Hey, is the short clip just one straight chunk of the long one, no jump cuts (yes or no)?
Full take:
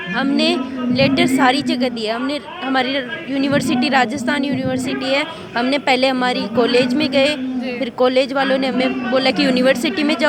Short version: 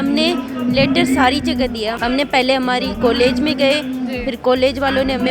no